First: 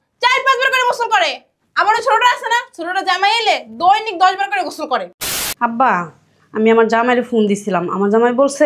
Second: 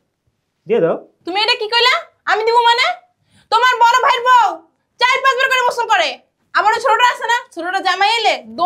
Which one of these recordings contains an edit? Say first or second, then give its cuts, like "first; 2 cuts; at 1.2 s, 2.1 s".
first; 1 cut; at 5.4 s